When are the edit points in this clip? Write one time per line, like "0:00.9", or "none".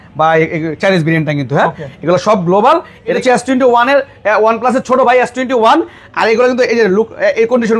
0:03.2